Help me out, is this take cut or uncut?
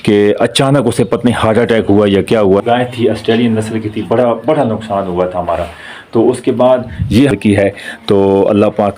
cut